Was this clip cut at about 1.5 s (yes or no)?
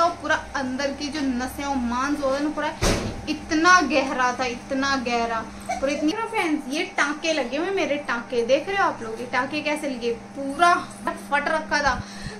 no